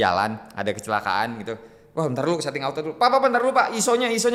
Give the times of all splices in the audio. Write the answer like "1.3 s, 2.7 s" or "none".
none